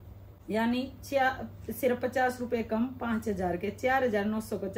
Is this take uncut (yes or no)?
yes